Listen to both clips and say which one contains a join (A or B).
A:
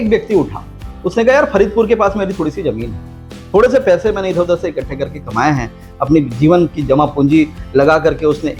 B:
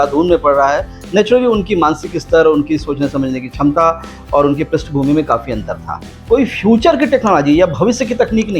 B